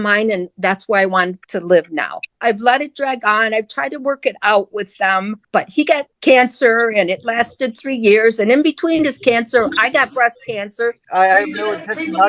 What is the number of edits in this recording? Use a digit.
3